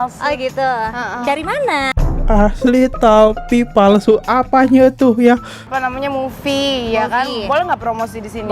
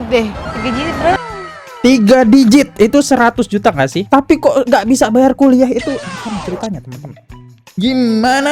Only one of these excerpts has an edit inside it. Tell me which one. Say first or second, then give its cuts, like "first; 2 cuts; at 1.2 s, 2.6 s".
first; 1 cut; at 5.6 s